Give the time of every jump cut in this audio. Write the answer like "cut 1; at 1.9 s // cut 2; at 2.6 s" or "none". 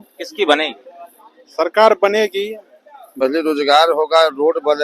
cut 1; at 3.2 s